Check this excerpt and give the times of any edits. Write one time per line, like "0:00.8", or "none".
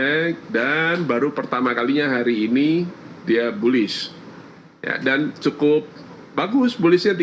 none